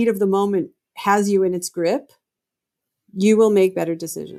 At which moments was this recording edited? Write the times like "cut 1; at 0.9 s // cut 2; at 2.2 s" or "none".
none